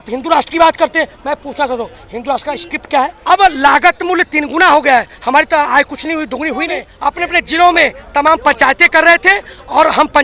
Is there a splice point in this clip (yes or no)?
yes